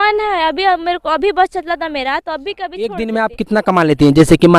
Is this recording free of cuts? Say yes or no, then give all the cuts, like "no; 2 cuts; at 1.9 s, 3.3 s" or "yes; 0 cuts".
no; 1 cut; at 2.8 s